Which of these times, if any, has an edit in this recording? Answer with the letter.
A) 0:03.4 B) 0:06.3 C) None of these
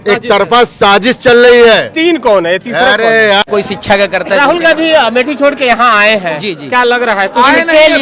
A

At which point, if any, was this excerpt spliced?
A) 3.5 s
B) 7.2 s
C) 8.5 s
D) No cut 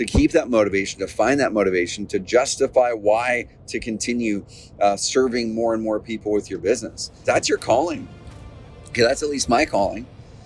B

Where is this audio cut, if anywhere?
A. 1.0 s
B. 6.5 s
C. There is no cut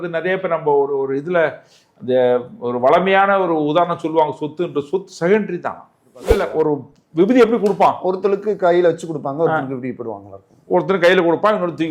B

